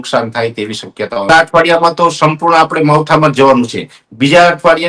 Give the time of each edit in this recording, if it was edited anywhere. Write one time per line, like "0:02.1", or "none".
0:01.3